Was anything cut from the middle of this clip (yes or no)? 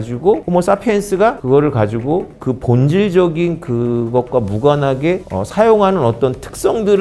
no